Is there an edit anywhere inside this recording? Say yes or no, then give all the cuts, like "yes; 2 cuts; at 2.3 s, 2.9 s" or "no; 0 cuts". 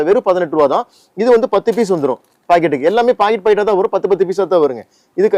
no; 0 cuts